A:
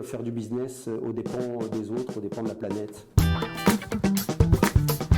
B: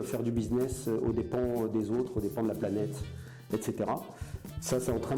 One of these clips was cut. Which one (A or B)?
A